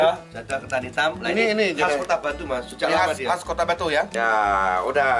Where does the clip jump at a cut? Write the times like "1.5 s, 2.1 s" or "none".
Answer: 4.1 s